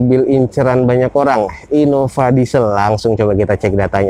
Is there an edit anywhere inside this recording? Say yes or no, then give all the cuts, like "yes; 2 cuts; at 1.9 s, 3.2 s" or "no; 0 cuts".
no; 0 cuts